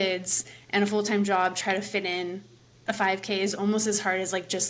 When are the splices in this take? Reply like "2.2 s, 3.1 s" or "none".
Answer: none